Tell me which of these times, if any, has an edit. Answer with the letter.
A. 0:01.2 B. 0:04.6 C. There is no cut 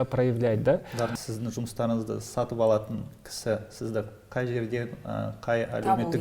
A